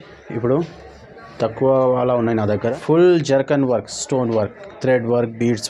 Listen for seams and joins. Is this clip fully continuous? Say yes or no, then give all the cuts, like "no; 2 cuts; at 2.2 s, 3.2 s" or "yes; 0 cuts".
no; 1 cut; at 2.6 s